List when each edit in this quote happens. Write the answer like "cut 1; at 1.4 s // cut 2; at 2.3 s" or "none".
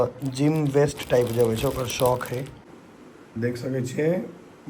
cut 1; at 2.6 s